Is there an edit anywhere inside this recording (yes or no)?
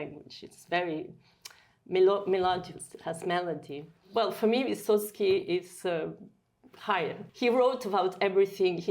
yes